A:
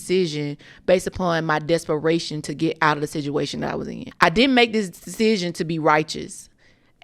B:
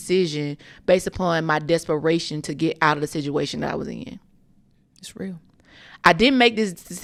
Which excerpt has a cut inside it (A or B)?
A